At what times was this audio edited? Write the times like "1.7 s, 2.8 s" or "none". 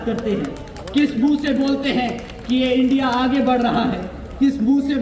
none